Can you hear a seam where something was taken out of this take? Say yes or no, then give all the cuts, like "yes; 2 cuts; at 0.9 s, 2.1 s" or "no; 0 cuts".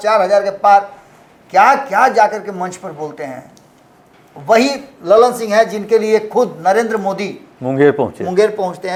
no; 0 cuts